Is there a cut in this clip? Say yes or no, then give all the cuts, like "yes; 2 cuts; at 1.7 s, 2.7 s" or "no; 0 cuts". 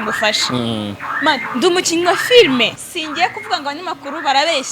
yes; 1 cut; at 2.8 s